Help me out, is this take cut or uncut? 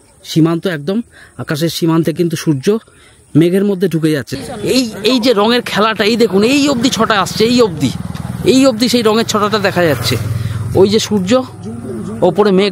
cut